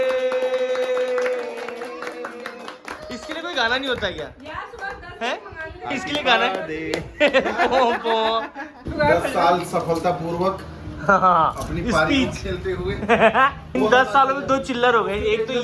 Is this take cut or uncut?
cut